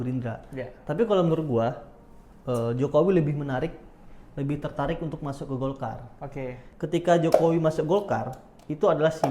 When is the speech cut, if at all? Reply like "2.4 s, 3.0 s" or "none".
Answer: 6.6 s

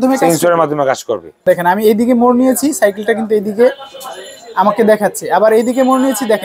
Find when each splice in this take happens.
1.4 s

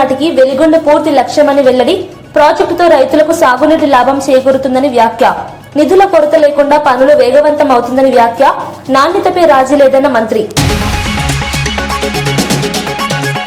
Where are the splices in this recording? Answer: none

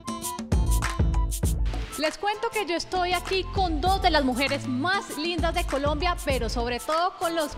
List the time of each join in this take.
none

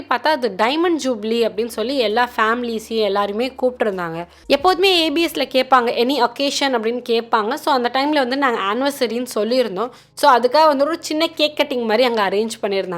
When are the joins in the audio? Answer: 4.3 s

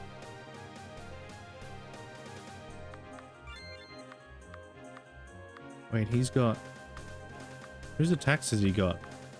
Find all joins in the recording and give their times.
none

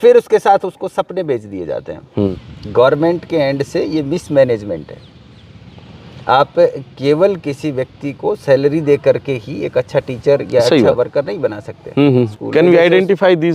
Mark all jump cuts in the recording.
2.3 s, 12.4 s

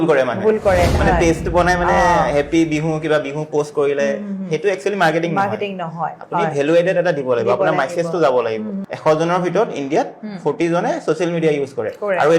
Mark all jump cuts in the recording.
1.0 s, 8.8 s

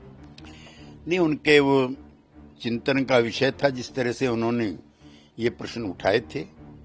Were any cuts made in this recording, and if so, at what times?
1.0 s

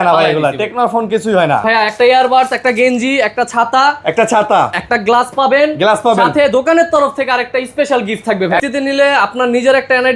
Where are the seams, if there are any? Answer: 1.6 s, 8.6 s

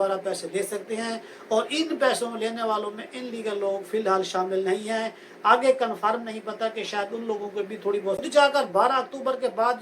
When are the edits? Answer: 8.3 s

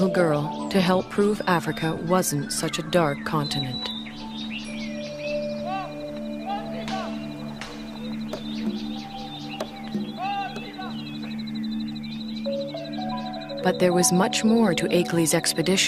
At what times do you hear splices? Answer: 11.9 s

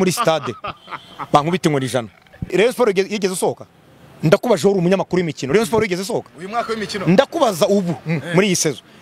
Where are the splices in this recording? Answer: 2.5 s

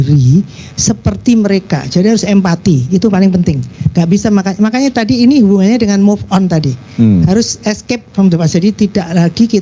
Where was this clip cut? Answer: none

